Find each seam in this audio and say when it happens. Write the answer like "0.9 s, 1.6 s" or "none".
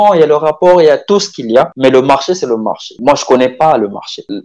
none